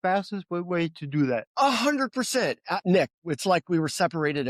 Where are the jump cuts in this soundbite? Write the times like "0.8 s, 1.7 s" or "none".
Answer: 1.5 s, 2.8 s